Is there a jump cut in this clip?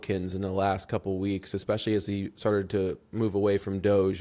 no; 0 cuts

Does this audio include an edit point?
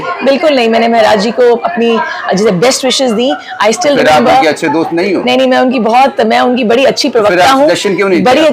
no; 0 cuts

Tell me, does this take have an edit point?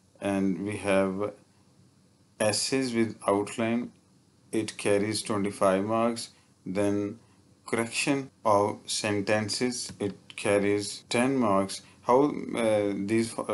yes; 3 cuts; at 8.3 s, 9.9 s, 11.0 s

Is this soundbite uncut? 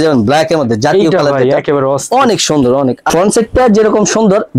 no; 1 cut; at 3.0 s

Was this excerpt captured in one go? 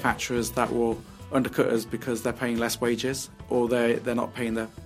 yes; 0 cuts

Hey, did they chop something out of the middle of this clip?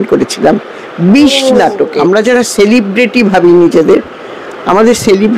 yes; 1 cut; at 2.0 s

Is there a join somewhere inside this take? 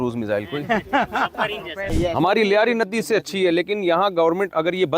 yes; 1 cut; at 1.9 s

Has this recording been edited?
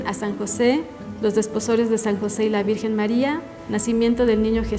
yes; 2 cuts; at 1.0 s, 3.5 s

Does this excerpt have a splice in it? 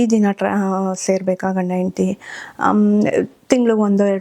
no; 0 cuts

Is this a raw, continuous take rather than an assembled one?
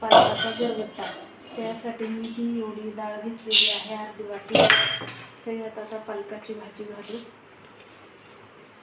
yes; 0 cuts

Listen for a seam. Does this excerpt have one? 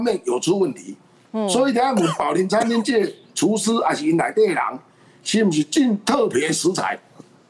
no; 0 cuts

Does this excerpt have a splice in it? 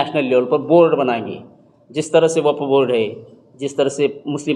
no; 0 cuts

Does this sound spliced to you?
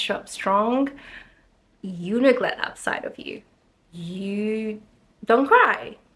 no; 0 cuts

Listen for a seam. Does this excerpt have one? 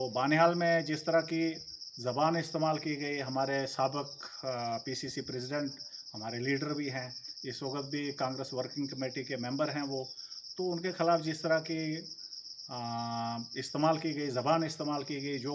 no; 0 cuts

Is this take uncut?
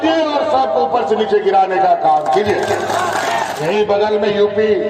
no; 1 cut; at 3.6 s

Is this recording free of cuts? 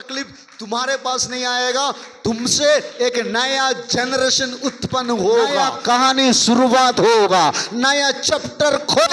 no; 1 cut; at 5.7 s

